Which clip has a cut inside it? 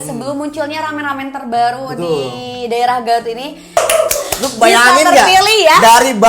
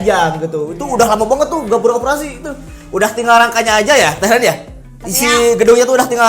first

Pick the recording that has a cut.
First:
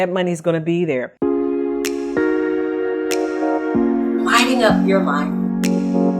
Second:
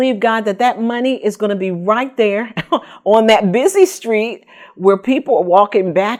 first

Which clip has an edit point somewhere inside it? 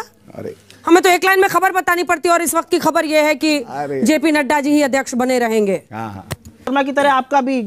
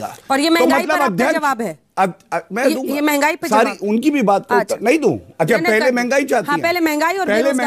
first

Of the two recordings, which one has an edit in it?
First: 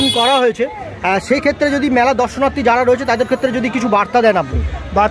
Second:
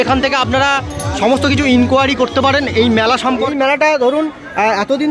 second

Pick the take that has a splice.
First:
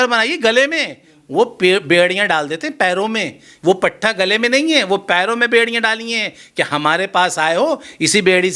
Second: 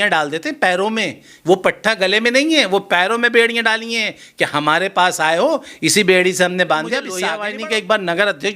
second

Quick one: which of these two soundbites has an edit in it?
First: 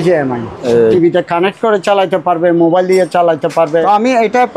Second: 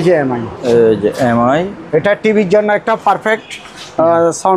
first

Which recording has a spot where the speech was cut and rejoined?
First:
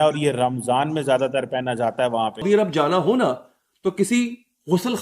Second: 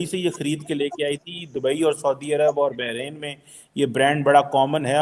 first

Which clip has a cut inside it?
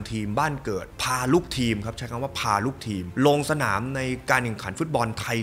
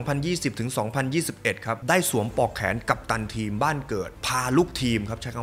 second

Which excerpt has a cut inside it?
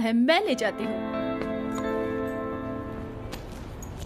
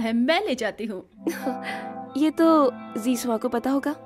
first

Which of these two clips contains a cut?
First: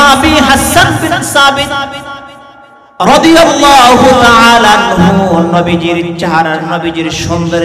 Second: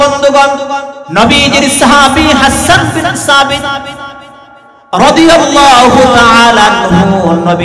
second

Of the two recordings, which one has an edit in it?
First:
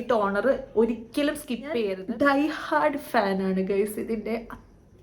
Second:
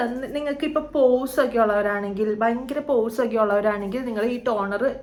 first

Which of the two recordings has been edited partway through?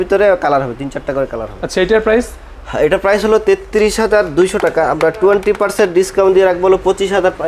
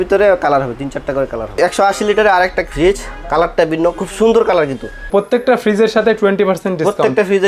second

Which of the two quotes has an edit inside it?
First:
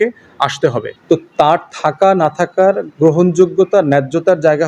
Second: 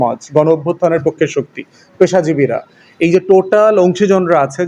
first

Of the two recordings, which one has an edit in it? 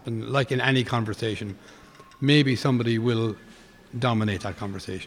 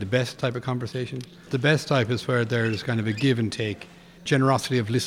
second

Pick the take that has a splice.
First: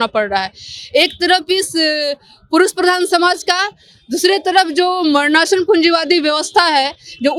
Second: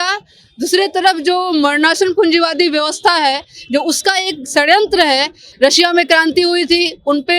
second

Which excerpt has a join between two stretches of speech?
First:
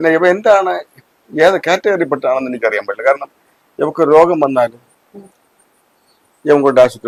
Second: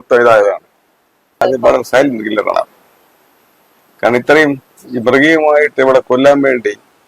second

